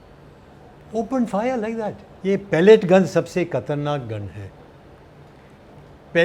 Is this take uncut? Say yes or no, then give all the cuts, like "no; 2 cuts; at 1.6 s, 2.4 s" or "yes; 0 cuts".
no; 1 cut; at 2.1 s